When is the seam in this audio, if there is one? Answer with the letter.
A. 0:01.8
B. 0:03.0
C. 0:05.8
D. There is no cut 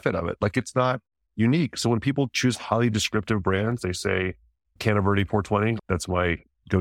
C